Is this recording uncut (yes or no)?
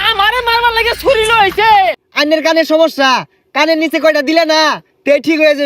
no